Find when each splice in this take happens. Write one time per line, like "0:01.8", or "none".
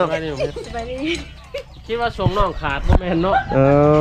none